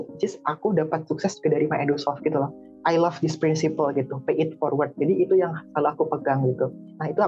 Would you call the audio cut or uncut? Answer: cut